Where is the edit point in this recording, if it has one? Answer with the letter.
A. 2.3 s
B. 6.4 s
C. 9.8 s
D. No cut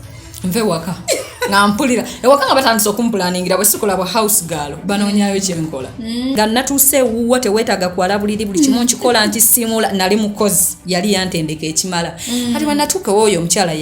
B